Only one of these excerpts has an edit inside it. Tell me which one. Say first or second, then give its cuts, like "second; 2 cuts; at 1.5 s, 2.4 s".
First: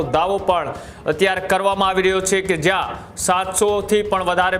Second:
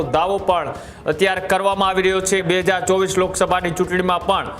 second; 1 cut; at 2.4 s